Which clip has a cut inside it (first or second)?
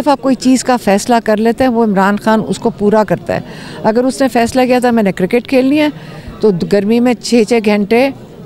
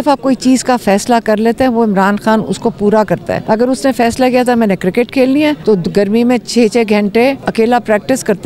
second